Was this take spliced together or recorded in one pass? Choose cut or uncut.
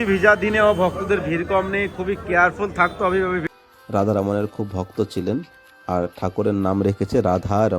cut